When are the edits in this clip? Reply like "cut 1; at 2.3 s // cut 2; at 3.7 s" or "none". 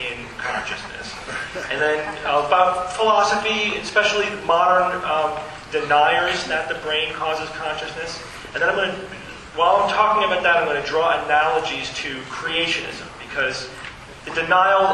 none